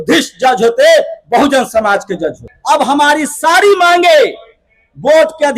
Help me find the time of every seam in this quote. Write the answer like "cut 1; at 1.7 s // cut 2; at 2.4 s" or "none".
cut 1; at 2.5 s

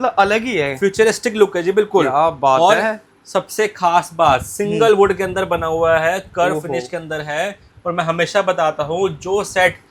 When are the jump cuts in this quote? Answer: none

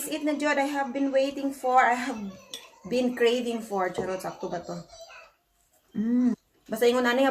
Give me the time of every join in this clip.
cut 1; at 6.4 s

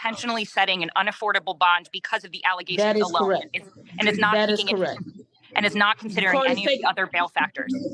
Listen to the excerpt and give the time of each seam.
none

